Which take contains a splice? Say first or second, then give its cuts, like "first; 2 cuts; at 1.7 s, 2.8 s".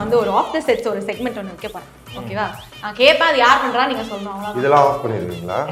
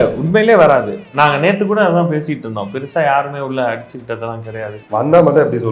second; 1 cut; at 4.8 s